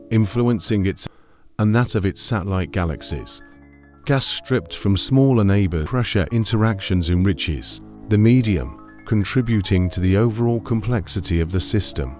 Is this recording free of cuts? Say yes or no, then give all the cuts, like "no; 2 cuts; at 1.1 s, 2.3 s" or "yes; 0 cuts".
no; 2 cuts; at 1.0 s, 5.9 s